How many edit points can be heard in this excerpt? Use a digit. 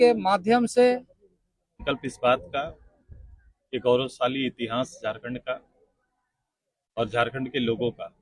1